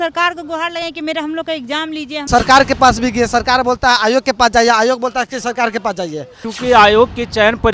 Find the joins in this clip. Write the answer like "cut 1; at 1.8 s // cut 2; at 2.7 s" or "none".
cut 1; at 2.2 s // cut 2; at 6.5 s